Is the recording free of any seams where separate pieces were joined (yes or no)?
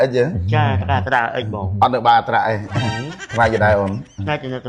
no